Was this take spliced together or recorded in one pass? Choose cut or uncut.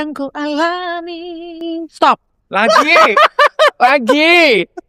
uncut